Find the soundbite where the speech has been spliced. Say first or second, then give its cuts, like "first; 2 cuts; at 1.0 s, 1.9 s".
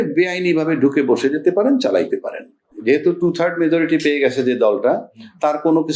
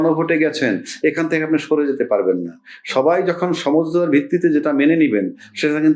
first; 1 cut; at 2.7 s